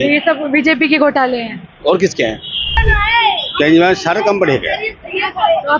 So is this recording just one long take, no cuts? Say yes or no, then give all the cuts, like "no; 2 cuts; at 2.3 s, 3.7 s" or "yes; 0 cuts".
no; 1 cut; at 2.7 s